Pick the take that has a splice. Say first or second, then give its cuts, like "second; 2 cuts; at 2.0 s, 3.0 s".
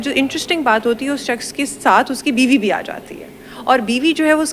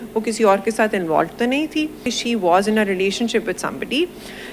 second; 1 cut; at 2.1 s